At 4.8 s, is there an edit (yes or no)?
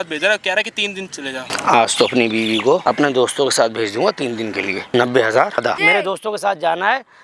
yes